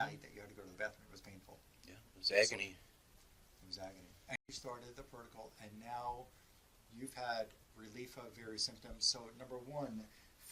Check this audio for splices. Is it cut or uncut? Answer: cut